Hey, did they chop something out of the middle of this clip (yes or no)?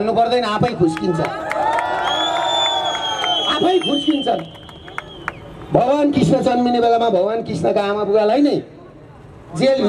no